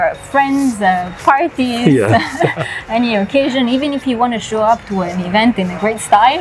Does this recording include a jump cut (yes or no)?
no